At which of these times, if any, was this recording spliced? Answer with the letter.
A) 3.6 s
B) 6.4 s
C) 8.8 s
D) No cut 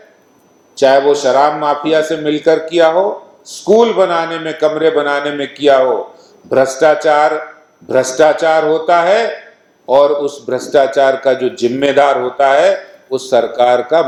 D